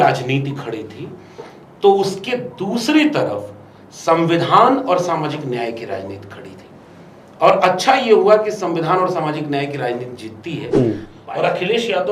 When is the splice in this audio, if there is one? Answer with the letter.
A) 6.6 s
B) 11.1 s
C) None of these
B